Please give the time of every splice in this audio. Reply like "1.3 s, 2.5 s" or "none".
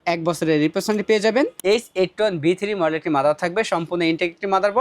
1.6 s